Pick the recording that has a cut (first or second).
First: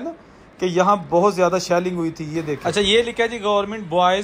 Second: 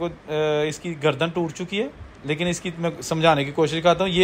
first